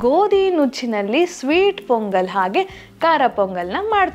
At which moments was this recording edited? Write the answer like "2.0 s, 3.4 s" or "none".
none